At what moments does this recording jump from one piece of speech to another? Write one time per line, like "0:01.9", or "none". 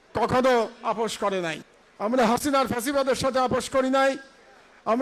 0:01.7